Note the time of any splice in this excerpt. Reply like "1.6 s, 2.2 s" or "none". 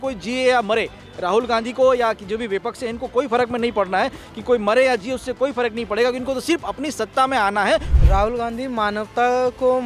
8.0 s